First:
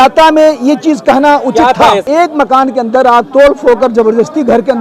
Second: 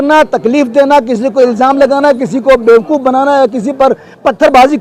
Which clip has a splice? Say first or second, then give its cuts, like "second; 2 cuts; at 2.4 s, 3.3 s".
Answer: first; 1 cut; at 2.0 s